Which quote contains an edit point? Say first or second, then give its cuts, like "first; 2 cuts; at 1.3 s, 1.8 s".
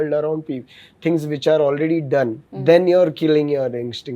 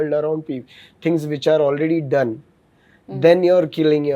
first; 1 cut; at 2.5 s